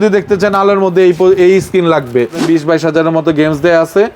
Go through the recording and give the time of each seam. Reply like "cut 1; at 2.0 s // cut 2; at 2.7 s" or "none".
cut 1; at 2.5 s